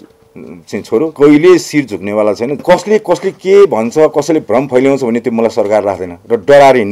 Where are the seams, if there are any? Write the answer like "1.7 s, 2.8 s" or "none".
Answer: 1.1 s, 2.6 s